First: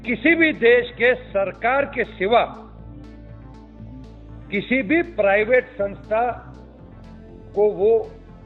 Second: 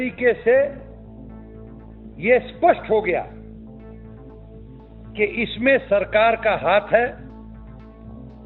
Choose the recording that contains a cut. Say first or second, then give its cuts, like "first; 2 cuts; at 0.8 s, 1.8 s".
second; 3 cuts; at 3.3 s, 4.7 s, 7.2 s